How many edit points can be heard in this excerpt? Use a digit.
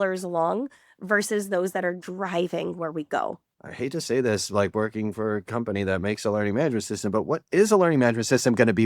1